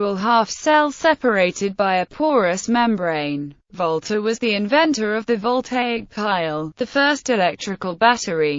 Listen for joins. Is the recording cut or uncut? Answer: cut